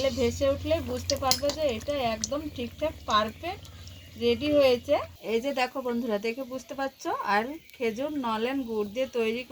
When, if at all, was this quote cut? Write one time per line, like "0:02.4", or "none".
0:05.1